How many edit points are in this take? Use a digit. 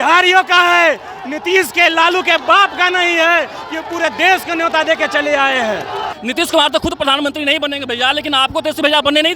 1